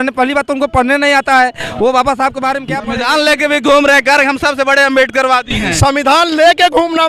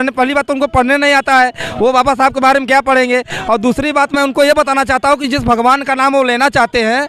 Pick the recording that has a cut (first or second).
first